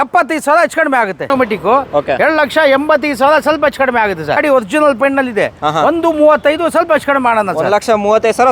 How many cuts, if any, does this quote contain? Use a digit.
2